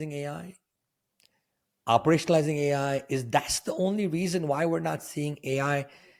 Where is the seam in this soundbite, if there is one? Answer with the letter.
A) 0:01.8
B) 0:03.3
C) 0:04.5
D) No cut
D